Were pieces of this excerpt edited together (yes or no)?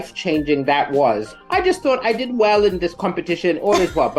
yes